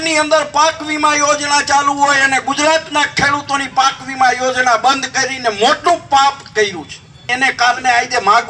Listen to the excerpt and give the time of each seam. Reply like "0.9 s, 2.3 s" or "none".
7.3 s